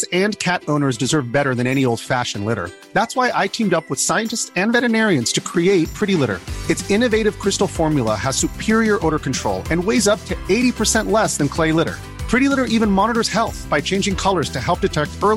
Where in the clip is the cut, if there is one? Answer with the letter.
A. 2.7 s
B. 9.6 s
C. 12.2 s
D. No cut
D